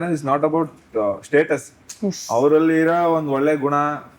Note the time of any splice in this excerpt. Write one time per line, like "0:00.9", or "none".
none